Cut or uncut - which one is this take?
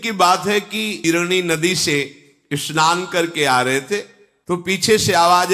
cut